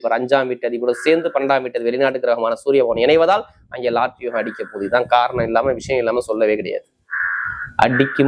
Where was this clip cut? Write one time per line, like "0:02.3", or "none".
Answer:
none